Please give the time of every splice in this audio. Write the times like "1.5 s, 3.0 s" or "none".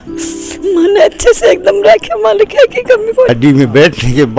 3.3 s